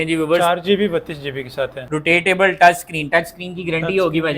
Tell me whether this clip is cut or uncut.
cut